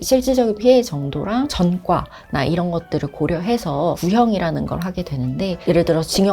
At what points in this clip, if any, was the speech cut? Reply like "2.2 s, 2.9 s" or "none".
1.5 s, 4.0 s